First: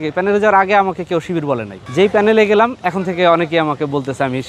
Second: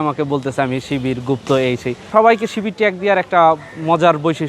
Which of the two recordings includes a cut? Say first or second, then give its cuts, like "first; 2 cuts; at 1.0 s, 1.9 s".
second; 1 cut; at 2.1 s